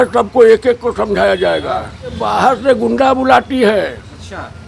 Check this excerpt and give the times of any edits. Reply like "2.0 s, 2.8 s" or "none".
2.2 s